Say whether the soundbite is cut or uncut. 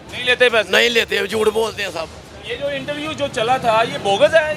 uncut